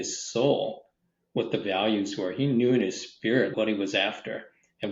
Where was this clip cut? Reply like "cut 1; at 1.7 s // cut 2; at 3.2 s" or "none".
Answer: cut 1; at 3.5 s